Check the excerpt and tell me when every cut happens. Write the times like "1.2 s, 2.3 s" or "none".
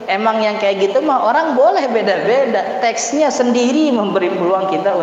none